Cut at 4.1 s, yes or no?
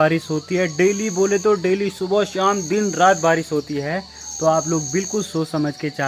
no